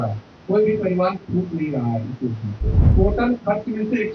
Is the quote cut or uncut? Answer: cut